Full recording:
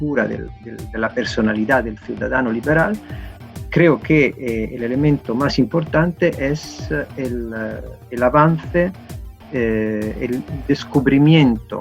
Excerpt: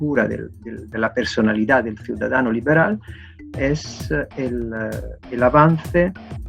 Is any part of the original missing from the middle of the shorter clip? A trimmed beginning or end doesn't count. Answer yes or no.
yes